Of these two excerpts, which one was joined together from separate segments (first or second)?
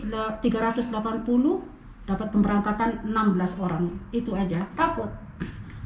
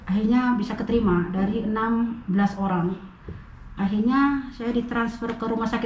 first